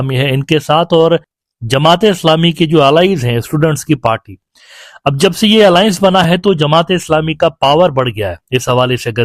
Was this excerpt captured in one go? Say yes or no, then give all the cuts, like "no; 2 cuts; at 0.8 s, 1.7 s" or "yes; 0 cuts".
yes; 0 cuts